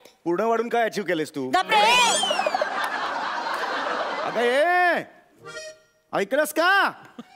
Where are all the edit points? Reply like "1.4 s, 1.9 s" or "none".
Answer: 4.3 s